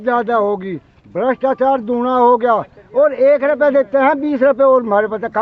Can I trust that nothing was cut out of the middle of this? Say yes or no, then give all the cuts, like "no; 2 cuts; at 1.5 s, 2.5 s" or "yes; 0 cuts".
yes; 0 cuts